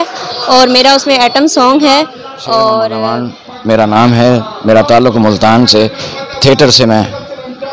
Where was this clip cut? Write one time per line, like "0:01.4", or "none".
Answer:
0:03.0